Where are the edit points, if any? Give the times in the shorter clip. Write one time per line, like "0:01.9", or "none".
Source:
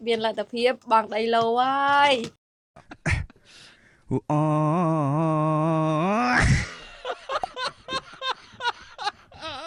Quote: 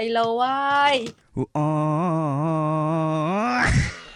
0:01.2

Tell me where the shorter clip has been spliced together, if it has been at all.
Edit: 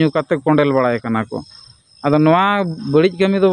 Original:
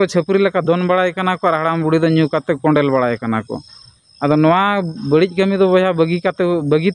none

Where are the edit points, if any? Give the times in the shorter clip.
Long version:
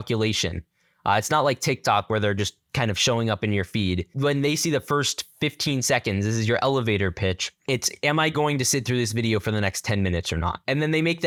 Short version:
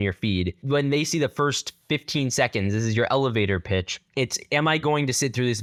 none

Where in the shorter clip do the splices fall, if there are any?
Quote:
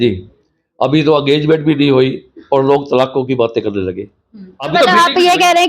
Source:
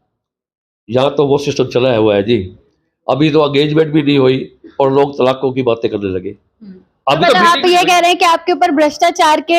0:04.7

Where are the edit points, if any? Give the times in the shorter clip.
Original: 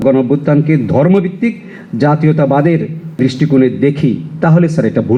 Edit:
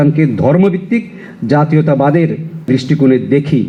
none

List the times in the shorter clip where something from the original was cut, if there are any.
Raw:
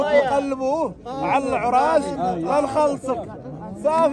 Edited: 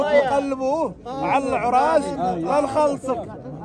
none

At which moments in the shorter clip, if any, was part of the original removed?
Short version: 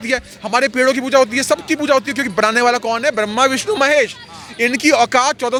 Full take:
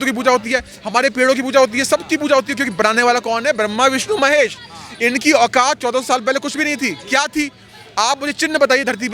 none

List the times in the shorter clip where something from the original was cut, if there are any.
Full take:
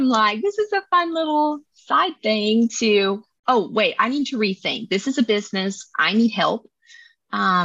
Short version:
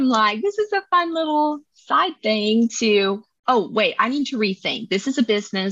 none

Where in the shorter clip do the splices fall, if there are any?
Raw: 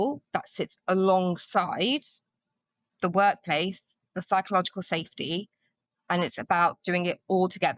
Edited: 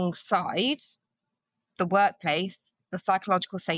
none

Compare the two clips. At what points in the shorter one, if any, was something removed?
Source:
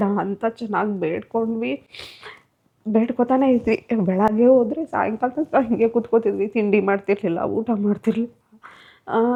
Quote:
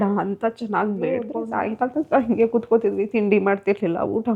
0:01.4

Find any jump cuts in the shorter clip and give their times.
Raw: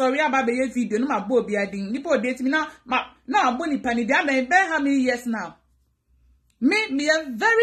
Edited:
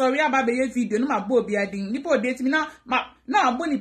none

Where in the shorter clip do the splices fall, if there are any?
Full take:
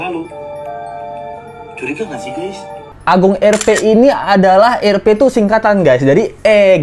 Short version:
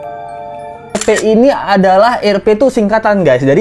0:01.0

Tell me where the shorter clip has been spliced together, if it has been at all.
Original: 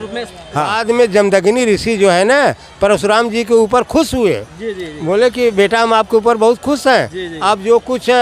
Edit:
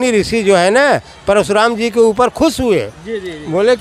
none

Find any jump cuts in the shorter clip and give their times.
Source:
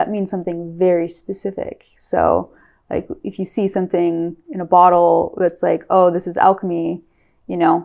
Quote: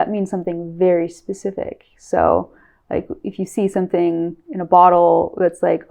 none

